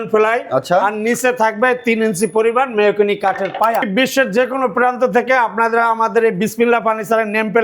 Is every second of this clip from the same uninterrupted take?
no; 1 cut; at 3.9 s

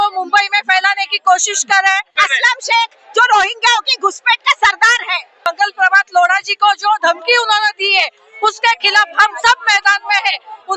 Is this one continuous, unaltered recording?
no; 2 cuts; at 2.2 s, 5.3 s

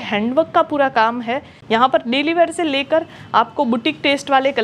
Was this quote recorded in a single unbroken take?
no; 1 cut; at 1.5 s

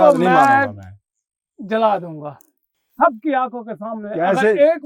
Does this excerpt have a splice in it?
no; 0 cuts

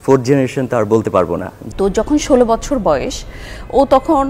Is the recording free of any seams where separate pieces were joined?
no; 1 cut; at 1.6 s

